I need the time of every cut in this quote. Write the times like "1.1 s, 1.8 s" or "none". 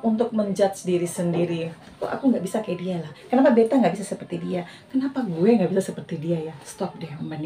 none